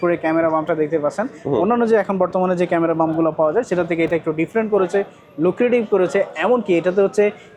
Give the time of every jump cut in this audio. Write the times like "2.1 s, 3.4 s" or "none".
none